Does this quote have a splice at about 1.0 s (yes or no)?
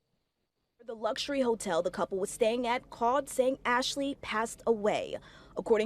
yes